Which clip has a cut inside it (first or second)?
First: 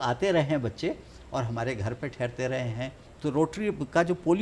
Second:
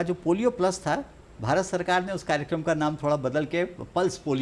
first